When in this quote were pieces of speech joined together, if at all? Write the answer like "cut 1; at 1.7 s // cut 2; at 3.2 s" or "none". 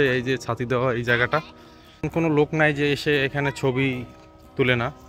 none